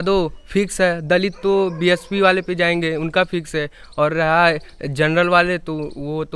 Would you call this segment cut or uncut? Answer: uncut